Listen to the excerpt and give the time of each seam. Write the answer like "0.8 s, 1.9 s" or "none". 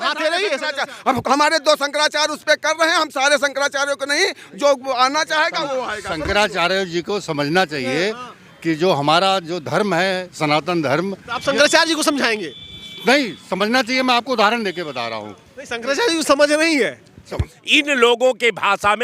17.5 s

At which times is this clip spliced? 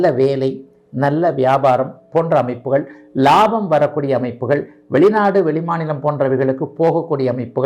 none

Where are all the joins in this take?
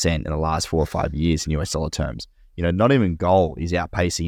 none

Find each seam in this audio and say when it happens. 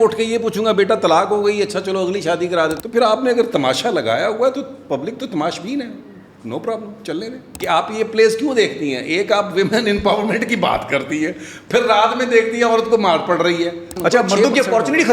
2.8 s, 7.5 s, 13.9 s

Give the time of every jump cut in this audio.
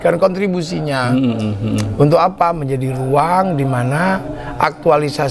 none

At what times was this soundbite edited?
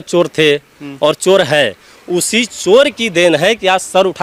none

